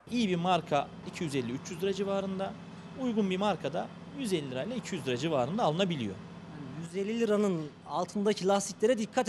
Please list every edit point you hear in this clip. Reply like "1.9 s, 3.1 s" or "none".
1.0 s

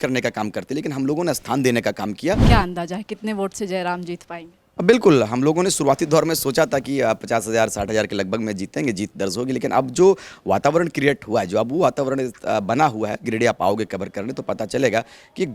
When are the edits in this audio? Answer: 2.4 s

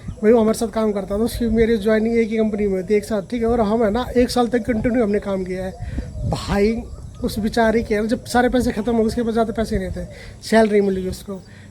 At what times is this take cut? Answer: none

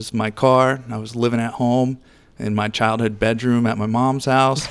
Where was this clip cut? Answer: none

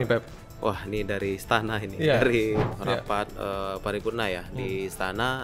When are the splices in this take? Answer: 2.7 s

